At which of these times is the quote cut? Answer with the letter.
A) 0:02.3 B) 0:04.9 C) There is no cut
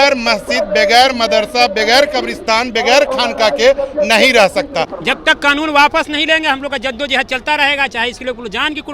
B